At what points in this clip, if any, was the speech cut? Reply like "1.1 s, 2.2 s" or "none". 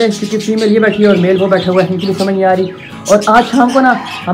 none